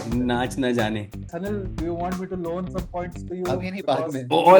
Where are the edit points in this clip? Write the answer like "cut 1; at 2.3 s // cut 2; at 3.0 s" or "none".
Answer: cut 1; at 1.2 s